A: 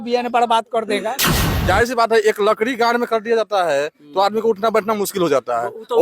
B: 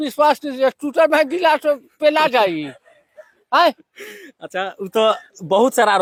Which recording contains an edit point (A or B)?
A